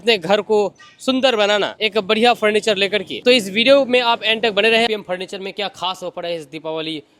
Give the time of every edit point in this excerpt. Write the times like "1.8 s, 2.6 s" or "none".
4.9 s